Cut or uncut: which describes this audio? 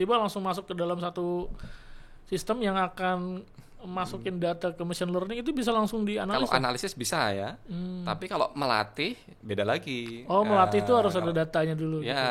uncut